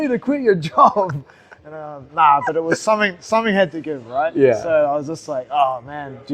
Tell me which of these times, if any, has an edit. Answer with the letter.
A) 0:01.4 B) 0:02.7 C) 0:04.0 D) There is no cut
D